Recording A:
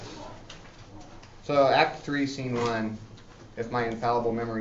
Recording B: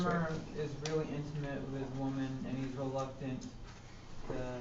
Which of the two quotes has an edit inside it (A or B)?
B